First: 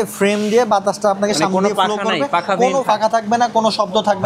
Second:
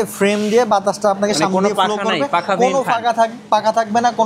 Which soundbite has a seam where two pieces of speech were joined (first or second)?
first